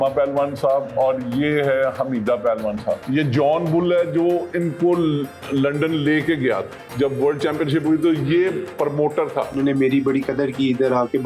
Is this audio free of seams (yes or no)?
no